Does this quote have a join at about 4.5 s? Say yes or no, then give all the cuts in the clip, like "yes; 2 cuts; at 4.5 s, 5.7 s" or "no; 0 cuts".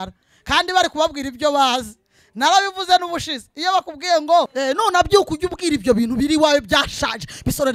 yes; 1 cut; at 4.5 s